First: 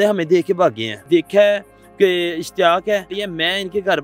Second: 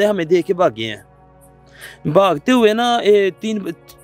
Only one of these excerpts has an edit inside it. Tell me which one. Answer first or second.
first